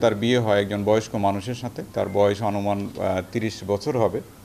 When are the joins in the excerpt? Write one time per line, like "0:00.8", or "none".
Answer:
0:01.8